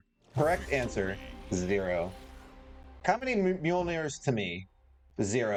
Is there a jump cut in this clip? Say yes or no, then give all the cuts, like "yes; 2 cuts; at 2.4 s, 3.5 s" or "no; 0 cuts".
no; 0 cuts